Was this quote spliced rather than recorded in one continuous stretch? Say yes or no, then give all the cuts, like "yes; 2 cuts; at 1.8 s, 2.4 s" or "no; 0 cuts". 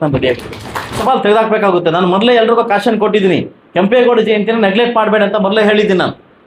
yes; 1 cut; at 1.0 s